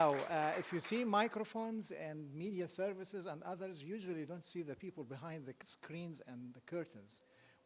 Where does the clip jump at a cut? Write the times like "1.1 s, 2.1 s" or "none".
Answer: 5.1 s